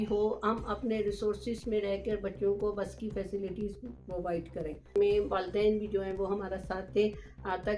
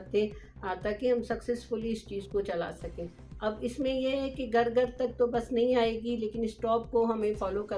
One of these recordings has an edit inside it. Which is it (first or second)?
first